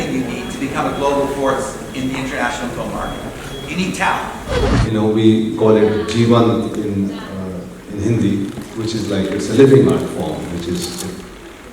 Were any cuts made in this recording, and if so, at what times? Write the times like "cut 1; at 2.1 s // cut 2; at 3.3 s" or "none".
cut 1; at 4.6 s